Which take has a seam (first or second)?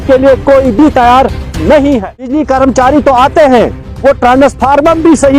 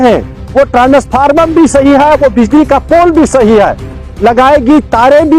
first